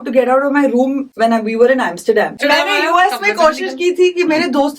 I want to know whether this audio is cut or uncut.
cut